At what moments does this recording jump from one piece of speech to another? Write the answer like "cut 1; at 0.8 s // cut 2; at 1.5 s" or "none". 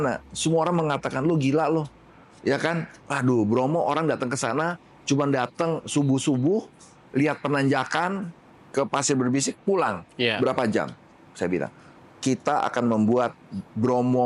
none